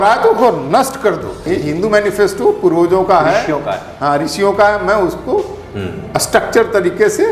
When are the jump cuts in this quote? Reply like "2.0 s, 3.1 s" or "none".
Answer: 1.4 s